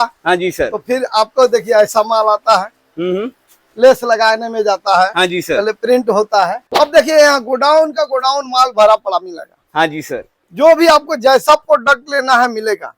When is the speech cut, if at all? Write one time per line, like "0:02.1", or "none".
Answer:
0:06.6